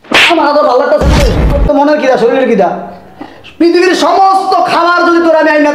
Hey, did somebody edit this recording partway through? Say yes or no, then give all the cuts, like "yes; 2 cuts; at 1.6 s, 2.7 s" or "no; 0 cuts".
yes; 1 cut; at 1.6 s